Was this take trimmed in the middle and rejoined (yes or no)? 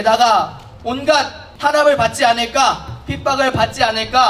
no